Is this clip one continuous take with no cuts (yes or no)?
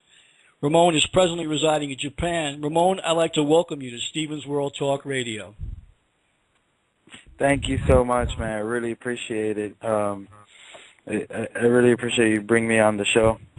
no